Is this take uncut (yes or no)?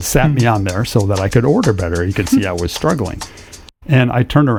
yes